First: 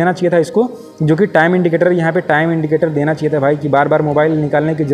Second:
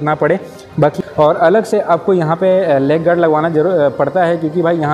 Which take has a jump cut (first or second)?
second